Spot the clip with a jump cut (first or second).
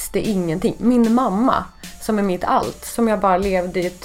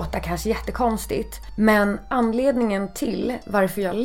second